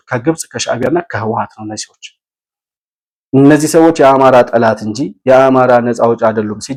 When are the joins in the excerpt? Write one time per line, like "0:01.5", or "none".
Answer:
none